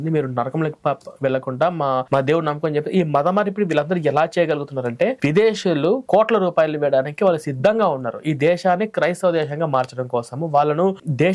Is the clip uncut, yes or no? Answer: yes